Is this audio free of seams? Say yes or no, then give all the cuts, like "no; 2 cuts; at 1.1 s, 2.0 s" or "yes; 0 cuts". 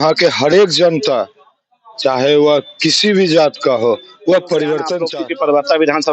no; 1 cut; at 5.0 s